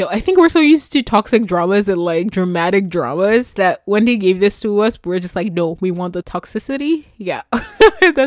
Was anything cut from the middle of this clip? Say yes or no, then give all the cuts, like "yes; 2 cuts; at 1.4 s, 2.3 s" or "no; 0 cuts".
no; 0 cuts